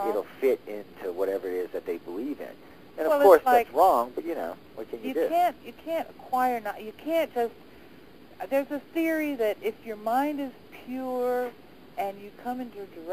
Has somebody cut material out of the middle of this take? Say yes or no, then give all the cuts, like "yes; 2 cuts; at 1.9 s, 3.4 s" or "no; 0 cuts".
yes; 1 cut; at 3.9 s